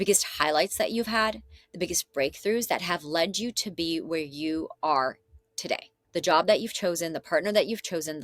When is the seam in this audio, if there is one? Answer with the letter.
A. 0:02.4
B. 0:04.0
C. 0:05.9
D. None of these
C